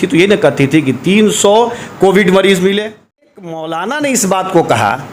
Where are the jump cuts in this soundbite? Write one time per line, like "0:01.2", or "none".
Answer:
0:03.3